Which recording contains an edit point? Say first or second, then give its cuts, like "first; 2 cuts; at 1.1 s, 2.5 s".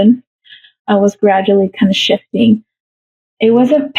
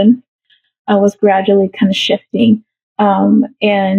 first; 1 cut; at 2.8 s